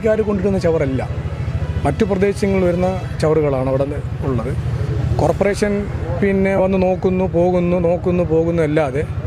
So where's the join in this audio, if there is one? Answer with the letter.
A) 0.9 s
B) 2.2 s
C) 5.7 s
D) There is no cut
D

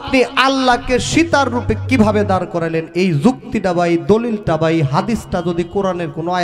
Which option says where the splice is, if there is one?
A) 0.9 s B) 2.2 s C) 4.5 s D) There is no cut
D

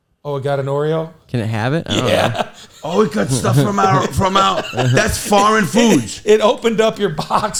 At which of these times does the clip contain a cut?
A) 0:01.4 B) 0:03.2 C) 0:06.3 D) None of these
D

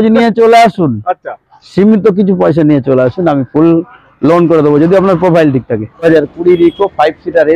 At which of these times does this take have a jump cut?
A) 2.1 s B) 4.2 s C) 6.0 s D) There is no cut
C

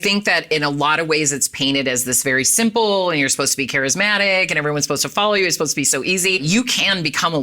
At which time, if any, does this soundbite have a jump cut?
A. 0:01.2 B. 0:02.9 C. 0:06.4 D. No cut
C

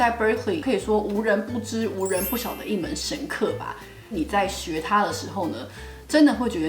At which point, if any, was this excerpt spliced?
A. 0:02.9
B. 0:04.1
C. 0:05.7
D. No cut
B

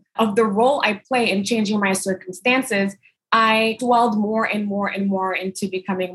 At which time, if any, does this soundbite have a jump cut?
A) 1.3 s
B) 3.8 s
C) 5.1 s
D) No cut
B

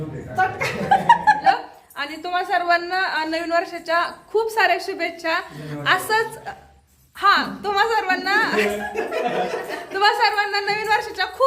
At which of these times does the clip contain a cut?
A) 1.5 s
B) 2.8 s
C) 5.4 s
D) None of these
A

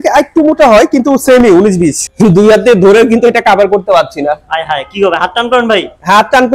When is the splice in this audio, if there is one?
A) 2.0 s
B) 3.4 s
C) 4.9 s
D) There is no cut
A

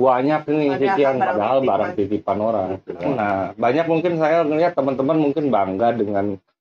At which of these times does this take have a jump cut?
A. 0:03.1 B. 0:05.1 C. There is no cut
A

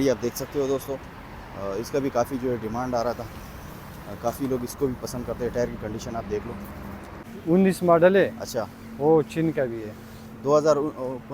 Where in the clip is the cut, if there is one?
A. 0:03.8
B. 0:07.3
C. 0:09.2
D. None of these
B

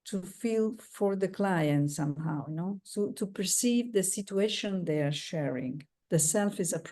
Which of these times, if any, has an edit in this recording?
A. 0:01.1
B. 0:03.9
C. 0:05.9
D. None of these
C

